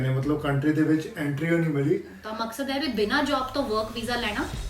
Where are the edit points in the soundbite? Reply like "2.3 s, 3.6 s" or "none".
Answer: 2.2 s